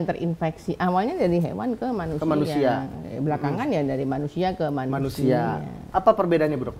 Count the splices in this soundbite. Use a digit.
1